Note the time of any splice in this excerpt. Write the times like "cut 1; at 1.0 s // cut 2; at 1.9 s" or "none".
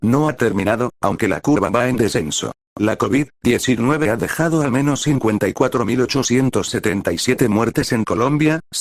cut 1; at 2.6 s